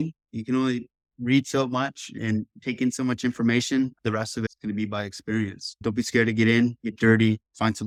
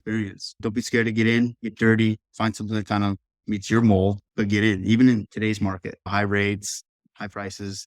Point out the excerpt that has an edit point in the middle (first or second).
second